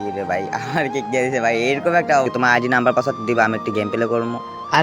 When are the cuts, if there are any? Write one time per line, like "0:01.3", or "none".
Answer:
0:02.3